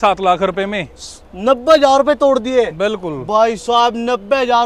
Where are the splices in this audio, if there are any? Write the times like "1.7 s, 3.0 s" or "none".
none